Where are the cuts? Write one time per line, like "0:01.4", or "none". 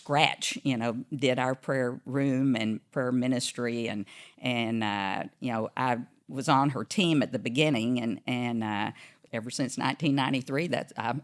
0:09.2